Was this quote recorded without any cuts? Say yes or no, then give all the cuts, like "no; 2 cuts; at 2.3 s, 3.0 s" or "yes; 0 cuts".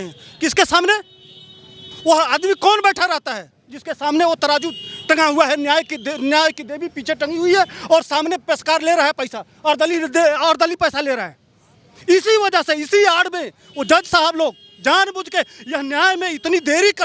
yes; 0 cuts